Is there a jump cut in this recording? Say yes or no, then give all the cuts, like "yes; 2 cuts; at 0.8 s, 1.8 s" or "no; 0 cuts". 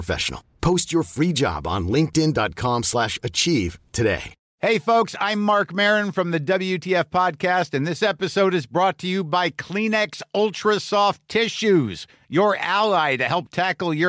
no; 0 cuts